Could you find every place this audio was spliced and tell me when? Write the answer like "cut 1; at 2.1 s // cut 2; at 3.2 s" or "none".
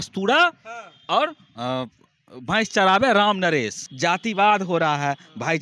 cut 1; at 3.8 s